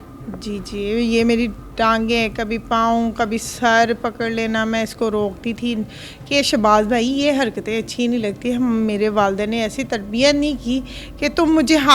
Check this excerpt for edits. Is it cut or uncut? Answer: uncut